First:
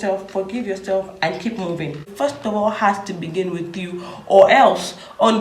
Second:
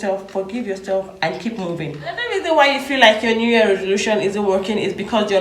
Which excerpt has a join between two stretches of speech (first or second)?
first